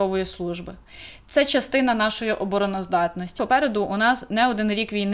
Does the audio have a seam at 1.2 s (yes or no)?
no